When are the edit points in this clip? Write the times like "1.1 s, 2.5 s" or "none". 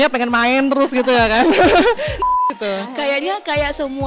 2.4 s